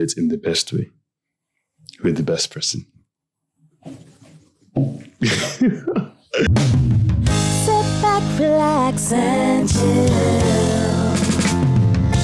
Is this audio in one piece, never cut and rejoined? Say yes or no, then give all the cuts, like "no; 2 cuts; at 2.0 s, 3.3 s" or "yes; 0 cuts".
no; 1 cut; at 6.5 s